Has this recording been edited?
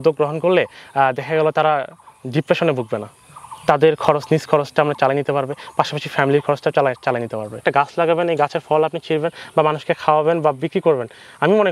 yes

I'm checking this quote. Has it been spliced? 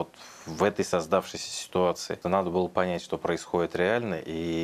yes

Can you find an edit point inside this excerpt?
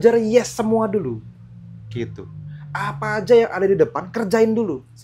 no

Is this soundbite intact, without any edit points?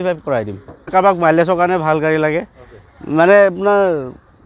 no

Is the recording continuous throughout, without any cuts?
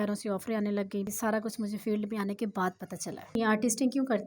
no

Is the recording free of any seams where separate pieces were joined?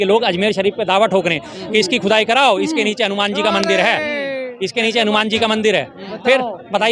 yes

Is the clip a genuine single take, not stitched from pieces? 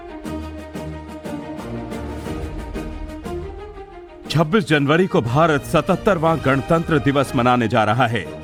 yes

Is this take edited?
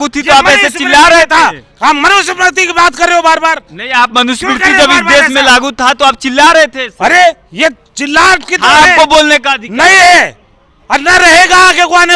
no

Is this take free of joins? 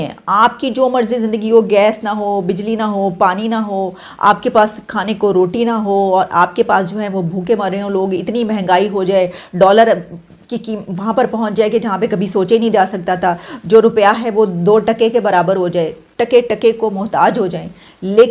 yes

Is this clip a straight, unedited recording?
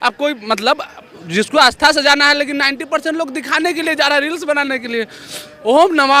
yes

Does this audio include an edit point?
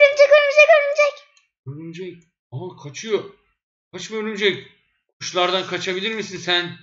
no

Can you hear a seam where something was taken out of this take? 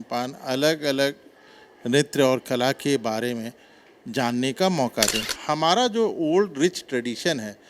yes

